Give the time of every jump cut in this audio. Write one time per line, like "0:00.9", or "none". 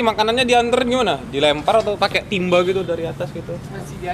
none

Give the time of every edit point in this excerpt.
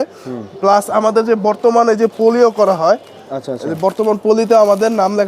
none

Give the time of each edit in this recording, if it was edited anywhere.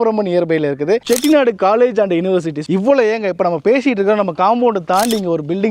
0:02.6

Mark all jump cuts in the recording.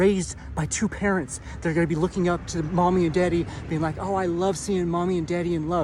none

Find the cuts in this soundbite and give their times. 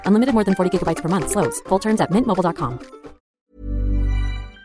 0:03.4

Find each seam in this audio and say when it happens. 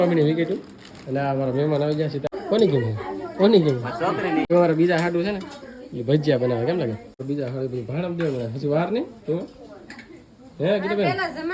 0:02.3
0:04.5
0:07.2

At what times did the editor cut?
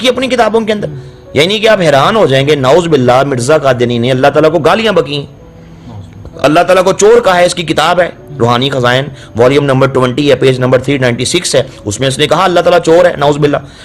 none

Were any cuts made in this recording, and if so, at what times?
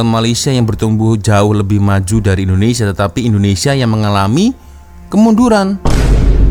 none

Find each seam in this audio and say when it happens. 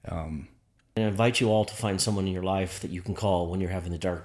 0:01.0

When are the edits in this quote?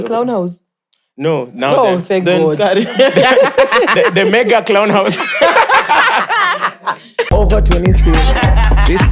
0:07.3

